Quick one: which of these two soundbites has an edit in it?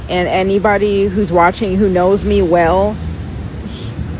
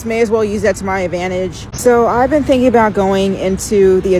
second; 1 cut; at 1.6 s

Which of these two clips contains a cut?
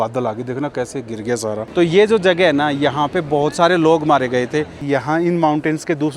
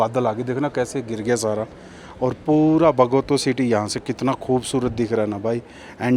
first; 2 cuts; at 1.6 s, 4.8 s

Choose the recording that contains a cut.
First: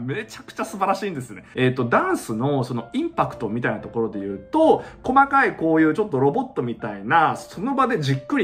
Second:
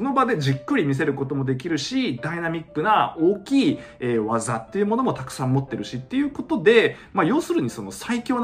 first; 1 cut; at 1.5 s

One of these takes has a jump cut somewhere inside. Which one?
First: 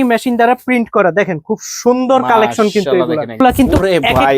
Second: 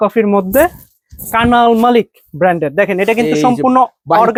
first; 1 cut; at 3.4 s

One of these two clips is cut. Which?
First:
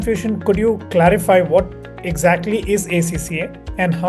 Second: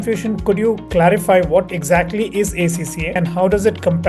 second; 2 cuts; at 1.8 s, 3.0 s

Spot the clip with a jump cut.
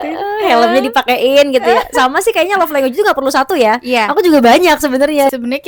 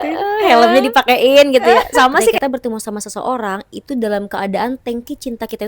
second; 1 cut; at 2.4 s

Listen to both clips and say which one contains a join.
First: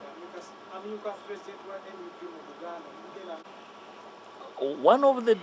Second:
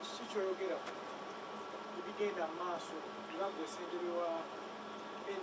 first; 1 cut; at 3.4 s

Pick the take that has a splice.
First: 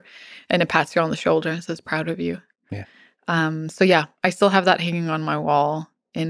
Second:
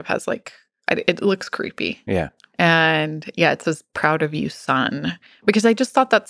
second; 1 cut; at 2.4 s

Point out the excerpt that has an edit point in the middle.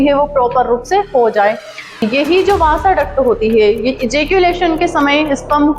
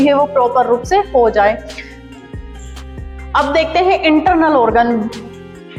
first; 1 cut; at 2.0 s

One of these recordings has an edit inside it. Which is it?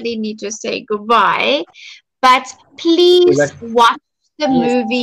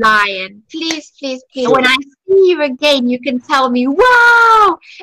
second; 1 cut; at 1.7 s

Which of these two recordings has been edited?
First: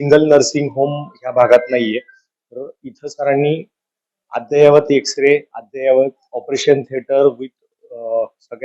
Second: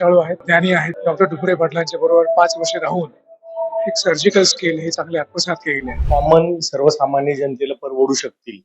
second; 2 cuts; at 0.9 s, 6.0 s

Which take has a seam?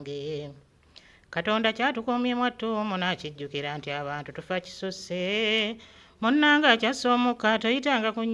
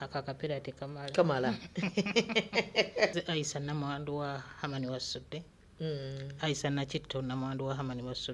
second; 1 cut; at 3.1 s

